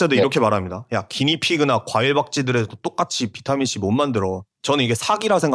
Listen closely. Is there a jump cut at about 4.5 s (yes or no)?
yes